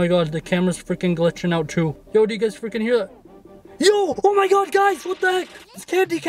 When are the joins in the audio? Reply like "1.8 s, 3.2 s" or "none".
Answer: 2.0 s